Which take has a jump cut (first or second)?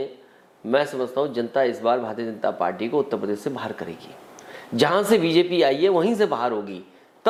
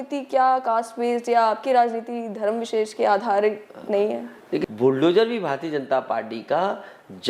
second